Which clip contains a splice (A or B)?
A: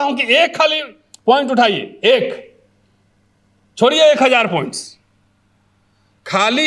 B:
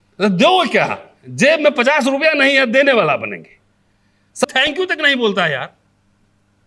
B